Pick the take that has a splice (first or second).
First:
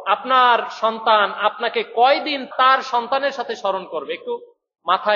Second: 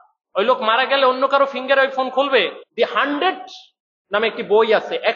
second